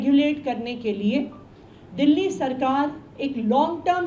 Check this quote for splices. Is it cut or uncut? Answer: uncut